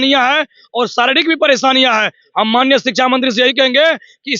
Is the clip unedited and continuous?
yes; 0 cuts

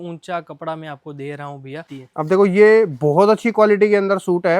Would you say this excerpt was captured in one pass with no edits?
no; 1 cut; at 2.0 s

